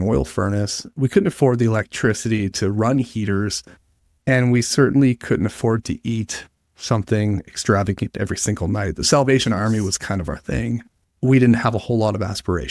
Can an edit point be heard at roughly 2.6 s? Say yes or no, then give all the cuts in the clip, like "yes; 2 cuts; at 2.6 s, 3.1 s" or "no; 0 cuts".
no; 1 cut; at 11.0 s